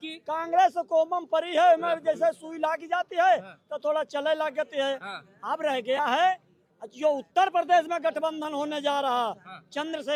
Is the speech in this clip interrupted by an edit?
no; 0 cuts

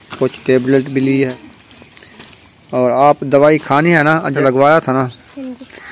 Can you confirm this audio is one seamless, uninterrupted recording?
no; 2 cuts; at 1.3 s, 4.3 s

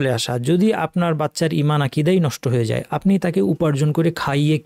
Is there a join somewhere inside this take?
no; 0 cuts

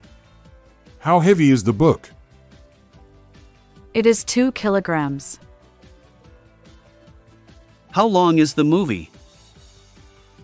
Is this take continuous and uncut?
no; 5 cuts; at 1.0 s, 2.1 s, 3.9 s, 5.3 s, 7.9 s

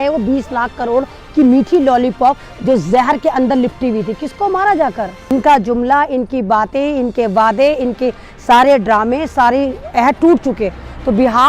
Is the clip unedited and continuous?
no; 1 cut; at 5.3 s

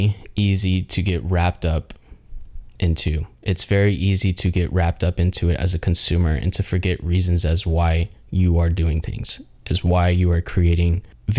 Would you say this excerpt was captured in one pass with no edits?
yes; 0 cuts

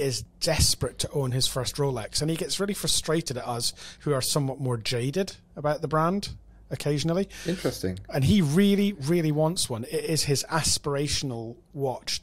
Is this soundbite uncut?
yes; 0 cuts

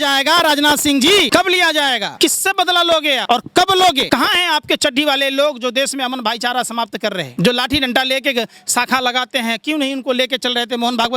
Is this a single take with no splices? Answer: no; 5 cuts; at 1.3 s, 2.1 s, 3.2 s, 4.0 s, 7.3 s

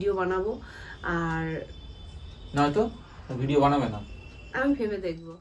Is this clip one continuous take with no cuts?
yes; 0 cuts

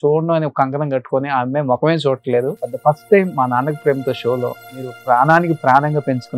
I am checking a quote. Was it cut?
yes; 2 cuts; at 2.7 s, 4.9 s

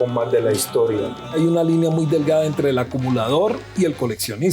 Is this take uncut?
no; 1 cut; at 1.2 s

